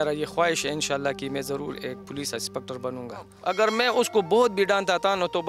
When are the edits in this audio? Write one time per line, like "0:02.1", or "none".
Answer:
0:03.3